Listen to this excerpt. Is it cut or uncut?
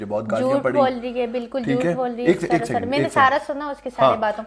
uncut